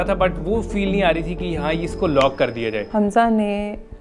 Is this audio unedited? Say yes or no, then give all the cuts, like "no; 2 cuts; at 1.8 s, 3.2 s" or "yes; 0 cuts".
no; 1 cut; at 2.8 s